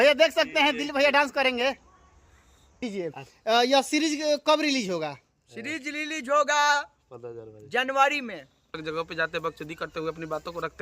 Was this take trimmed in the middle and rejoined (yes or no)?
yes